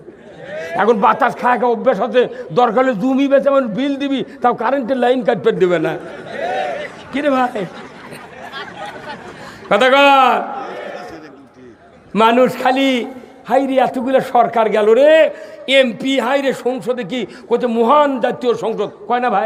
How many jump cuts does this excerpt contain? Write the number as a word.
zero